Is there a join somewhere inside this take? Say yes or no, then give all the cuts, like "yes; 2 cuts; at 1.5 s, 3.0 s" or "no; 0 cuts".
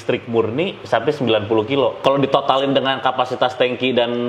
yes; 1 cut; at 2.0 s